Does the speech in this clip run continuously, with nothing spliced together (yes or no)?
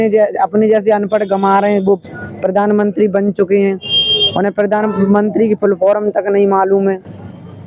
yes